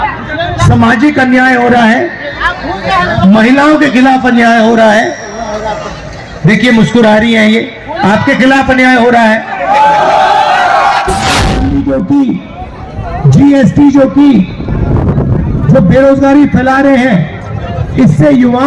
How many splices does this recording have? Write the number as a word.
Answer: one